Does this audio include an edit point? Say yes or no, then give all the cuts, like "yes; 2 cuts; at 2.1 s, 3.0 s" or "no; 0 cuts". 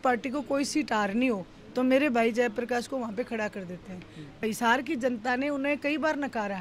yes; 1 cut; at 4.4 s